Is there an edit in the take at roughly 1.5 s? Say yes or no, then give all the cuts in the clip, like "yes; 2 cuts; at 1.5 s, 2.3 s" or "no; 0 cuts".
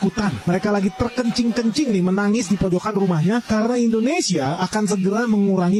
no; 0 cuts